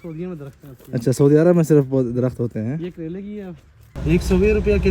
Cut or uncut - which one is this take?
cut